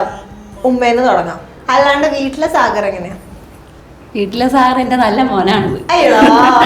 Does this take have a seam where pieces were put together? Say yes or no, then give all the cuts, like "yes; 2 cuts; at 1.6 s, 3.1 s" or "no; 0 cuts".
yes; 1 cut; at 1.5 s